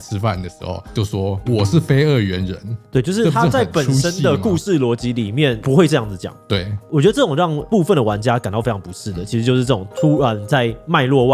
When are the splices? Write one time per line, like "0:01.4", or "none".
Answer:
0:00.9
0:02.7
0:05.6